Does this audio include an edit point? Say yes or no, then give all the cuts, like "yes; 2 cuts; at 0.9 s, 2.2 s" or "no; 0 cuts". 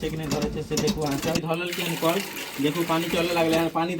yes; 1 cut; at 1.4 s